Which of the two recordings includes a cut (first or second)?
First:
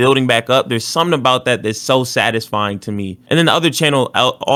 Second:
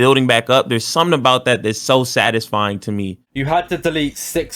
second